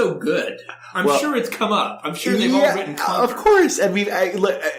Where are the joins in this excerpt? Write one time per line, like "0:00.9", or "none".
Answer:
none